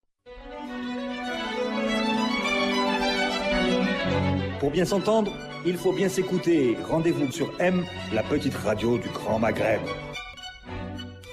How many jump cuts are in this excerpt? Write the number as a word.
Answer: one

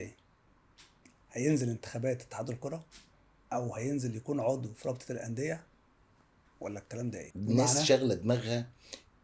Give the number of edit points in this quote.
one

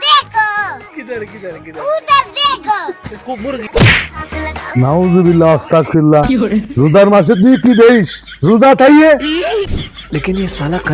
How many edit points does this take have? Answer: one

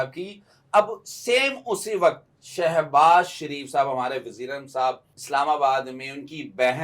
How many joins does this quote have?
one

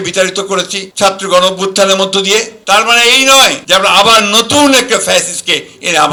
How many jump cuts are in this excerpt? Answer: zero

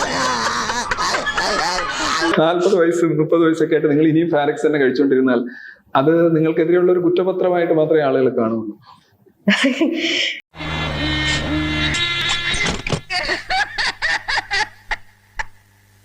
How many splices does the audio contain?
one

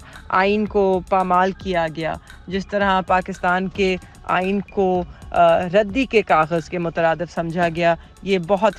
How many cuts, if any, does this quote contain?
zero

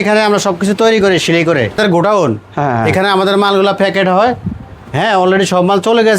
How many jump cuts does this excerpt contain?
one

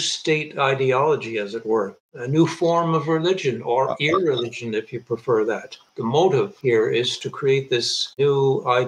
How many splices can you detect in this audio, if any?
two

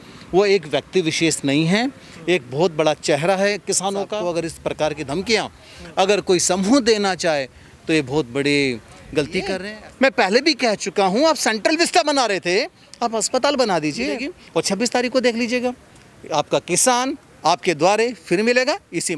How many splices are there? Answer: three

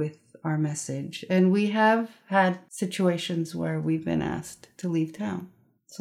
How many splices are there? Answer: one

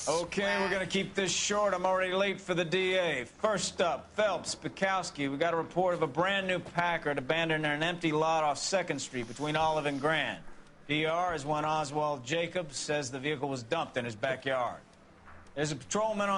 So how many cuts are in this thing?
one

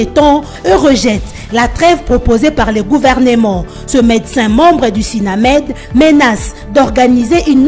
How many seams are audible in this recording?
zero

